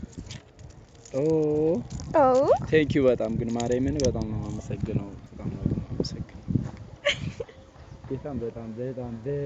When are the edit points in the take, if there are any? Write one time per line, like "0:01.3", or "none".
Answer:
0:05.3